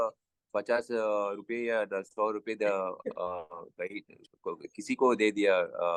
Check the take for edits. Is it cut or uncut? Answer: uncut